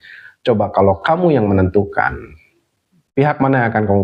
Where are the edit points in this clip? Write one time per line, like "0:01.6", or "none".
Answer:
none

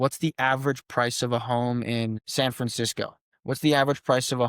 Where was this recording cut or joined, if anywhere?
0:02.2
0:03.3

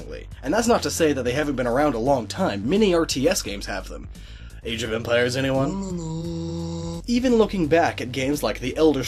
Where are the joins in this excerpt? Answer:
0:06.0

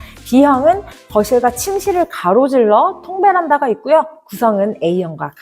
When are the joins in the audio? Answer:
none

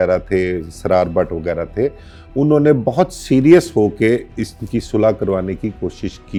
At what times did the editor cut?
none

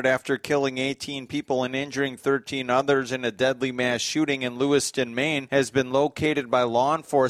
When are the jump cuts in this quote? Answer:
0:05.4

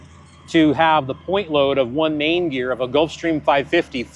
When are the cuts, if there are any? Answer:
none

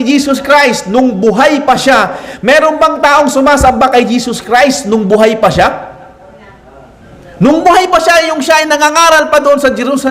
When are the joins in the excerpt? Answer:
0:02.2

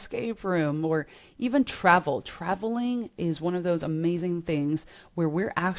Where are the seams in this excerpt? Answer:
none

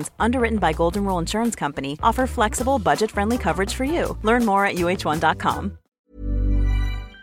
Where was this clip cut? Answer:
0:05.8

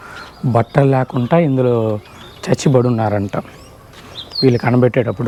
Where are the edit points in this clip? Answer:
none

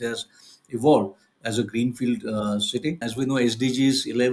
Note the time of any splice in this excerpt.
0:03.1

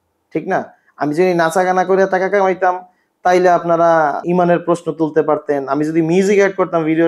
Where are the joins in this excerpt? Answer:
0:04.2

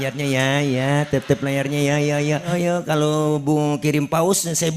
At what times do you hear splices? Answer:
0:02.5

